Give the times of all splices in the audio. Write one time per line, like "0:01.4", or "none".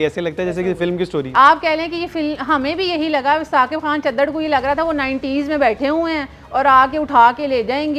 none